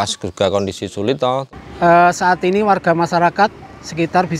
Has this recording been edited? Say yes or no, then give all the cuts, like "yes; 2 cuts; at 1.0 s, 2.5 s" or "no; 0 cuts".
yes; 1 cut; at 1.6 s